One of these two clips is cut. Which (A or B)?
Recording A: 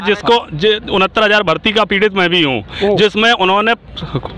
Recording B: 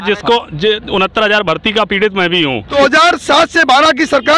B